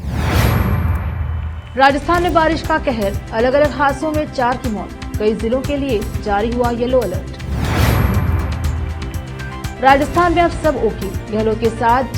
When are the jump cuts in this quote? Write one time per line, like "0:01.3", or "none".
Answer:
0:01.6